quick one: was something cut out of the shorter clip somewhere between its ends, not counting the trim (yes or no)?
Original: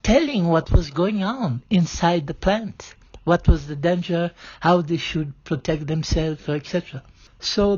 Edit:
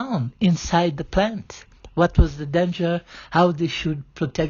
no